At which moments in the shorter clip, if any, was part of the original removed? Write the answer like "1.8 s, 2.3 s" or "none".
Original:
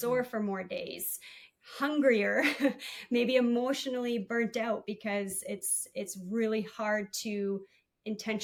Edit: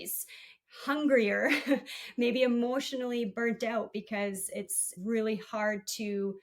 4.9 s